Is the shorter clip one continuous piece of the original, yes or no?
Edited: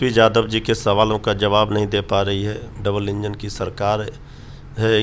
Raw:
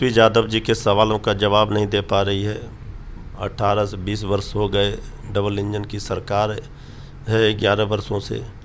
no